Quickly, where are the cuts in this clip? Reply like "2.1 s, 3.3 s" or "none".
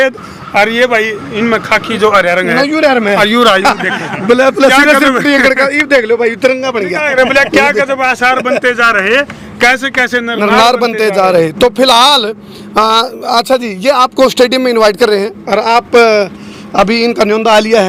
none